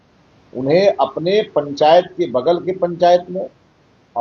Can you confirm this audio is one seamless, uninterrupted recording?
yes; 0 cuts

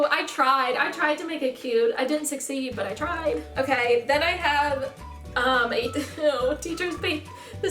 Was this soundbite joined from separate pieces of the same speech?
yes; 1 cut; at 3.5 s

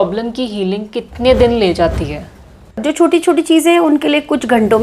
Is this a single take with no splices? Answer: no; 1 cut; at 2.8 s

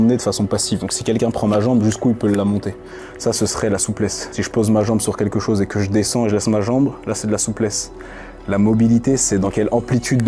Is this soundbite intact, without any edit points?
yes; 0 cuts

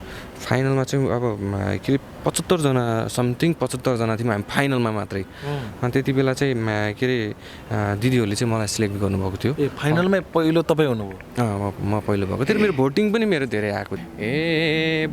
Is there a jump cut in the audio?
yes; 1 cut; at 13.9 s

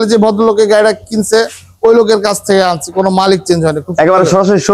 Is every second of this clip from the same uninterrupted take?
yes; 0 cuts

